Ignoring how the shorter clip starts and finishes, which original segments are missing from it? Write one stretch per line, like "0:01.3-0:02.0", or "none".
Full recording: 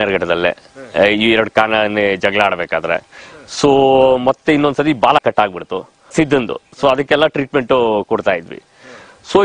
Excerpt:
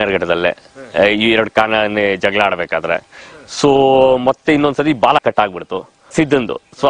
none

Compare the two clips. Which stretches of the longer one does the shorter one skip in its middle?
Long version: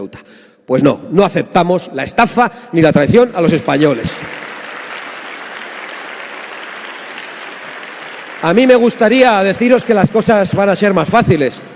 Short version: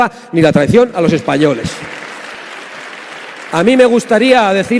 0:04.7-0:07.2

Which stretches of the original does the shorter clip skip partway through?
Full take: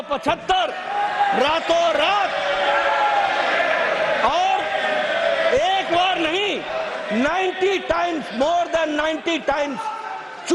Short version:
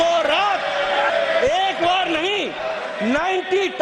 0:02.8-0:05.2

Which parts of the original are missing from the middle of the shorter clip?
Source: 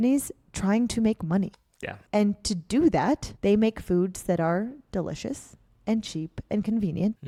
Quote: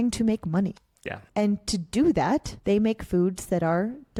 none

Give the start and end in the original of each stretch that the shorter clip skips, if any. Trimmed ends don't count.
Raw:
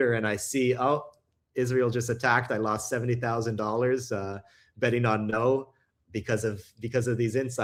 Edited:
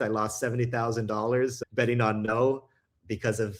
0:04.1-0:04.7

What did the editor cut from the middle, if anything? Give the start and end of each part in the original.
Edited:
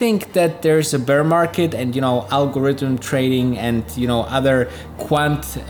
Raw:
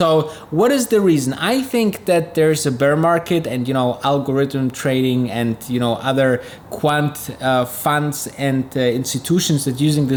none

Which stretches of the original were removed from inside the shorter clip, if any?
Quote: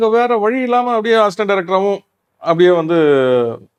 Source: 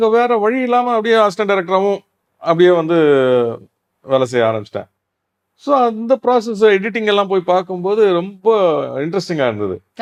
none

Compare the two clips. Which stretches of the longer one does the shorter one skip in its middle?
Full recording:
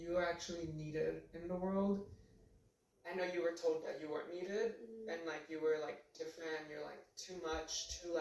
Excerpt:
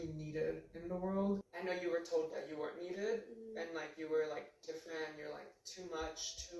0:02.1-0:03.0

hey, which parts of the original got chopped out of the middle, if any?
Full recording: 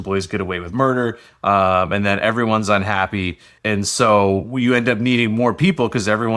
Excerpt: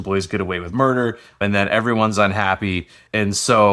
0:01.4-0:01.9

